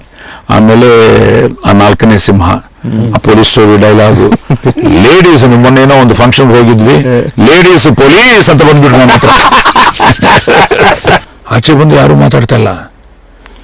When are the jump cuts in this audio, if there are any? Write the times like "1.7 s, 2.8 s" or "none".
11.3 s